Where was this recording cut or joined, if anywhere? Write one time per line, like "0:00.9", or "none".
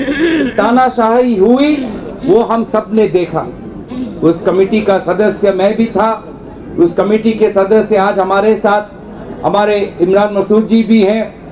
none